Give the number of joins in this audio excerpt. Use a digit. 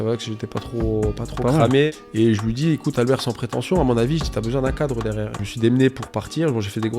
2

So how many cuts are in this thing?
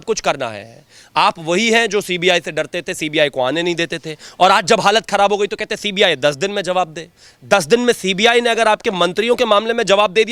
0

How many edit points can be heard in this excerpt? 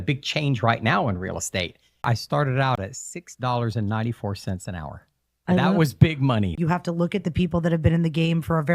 2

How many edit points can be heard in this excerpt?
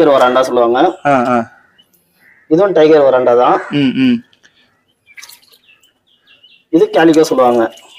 0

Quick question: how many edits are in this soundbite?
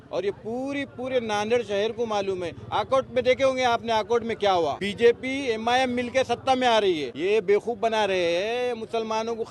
2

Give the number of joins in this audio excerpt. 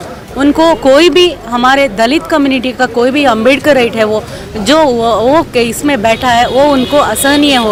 0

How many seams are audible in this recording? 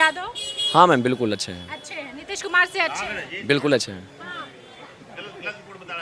0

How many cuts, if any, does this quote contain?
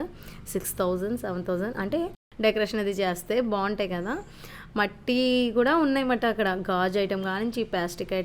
1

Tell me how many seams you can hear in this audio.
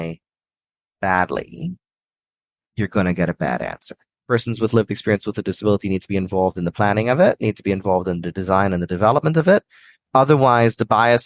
1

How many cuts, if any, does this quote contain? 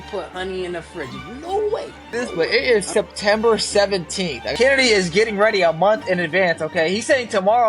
2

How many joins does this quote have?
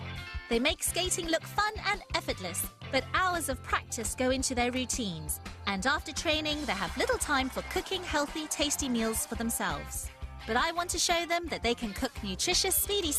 0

